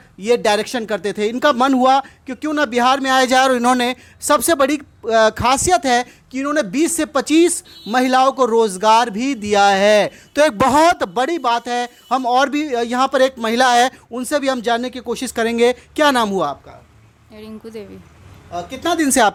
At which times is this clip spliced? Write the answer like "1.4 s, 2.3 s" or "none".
none